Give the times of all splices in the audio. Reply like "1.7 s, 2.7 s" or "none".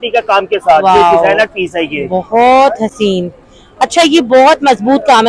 none